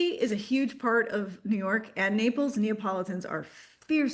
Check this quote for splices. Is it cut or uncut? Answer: uncut